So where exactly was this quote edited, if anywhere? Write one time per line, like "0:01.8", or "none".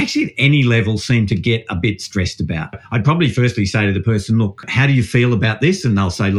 0:02.8
0:04.7